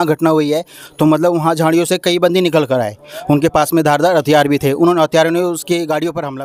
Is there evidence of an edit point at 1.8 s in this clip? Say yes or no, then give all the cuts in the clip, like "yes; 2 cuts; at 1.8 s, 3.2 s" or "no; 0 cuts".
no; 0 cuts